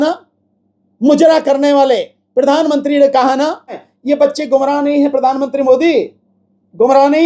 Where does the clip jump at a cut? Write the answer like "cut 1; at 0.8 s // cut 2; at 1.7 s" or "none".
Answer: cut 1; at 3.9 s